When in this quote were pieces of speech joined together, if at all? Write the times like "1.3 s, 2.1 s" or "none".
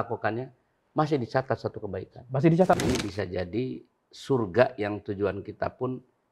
2.8 s